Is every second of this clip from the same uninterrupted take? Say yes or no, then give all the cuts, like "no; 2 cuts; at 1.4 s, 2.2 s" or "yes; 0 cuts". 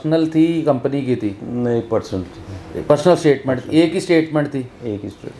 yes; 0 cuts